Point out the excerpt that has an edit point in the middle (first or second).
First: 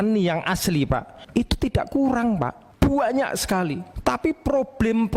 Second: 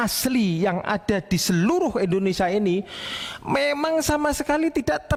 first